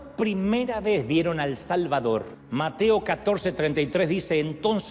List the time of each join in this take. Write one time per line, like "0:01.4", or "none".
0:02.4

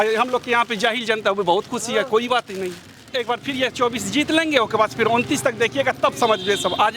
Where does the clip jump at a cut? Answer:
0:03.1

